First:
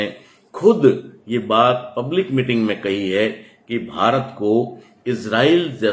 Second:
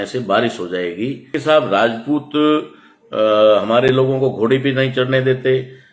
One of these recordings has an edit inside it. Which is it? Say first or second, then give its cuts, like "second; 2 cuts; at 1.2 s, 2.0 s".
second; 1 cut; at 1.4 s